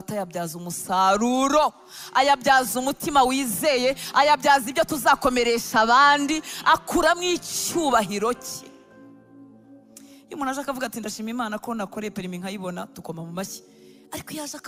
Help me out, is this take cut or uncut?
uncut